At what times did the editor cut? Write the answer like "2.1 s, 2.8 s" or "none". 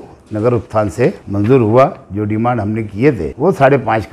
1.2 s, 3.3 s